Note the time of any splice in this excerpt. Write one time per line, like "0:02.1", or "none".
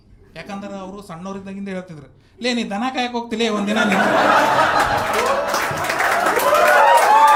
none